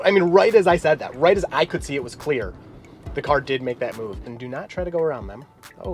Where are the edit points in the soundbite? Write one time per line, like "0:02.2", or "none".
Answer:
0:04.3

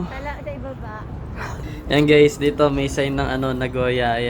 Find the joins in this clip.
0:01.6

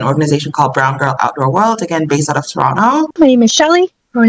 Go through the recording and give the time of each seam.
0:03.1

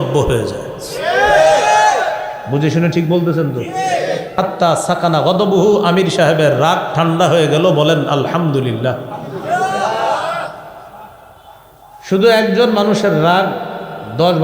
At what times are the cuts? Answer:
0:04.3

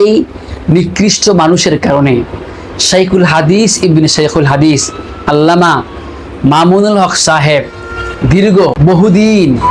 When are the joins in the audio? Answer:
0:08.8

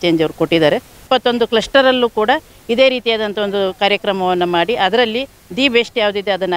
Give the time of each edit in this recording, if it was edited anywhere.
0:01.0

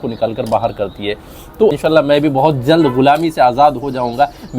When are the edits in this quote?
0:01.8

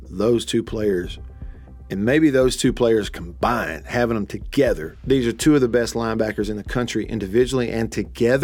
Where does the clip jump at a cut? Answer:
0:04.9

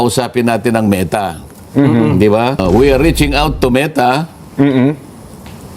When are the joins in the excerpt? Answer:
0:02.6

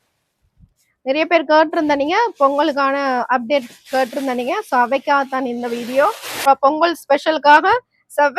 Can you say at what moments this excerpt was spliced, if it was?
0:06.5

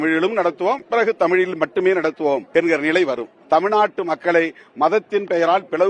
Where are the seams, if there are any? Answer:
0:02.5
0:03.3

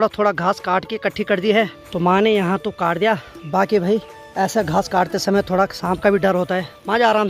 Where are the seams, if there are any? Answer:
none

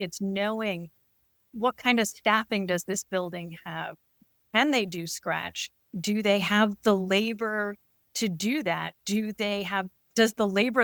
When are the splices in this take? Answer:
none

